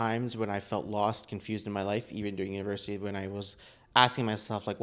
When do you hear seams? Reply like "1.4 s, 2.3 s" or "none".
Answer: none